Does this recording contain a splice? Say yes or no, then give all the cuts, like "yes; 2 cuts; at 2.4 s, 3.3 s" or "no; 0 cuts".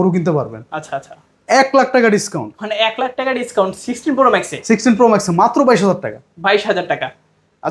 no; 0 cuts